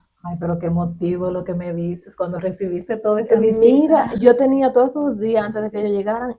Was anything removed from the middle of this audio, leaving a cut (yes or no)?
no